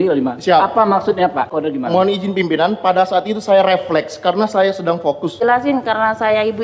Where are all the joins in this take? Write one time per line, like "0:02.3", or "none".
0:01.5
0:05.4